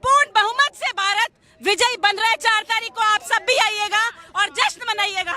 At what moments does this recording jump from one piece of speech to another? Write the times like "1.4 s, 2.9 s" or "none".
none